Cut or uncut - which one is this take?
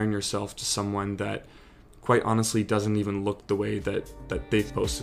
uncut